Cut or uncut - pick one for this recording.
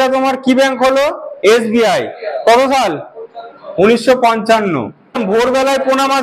cut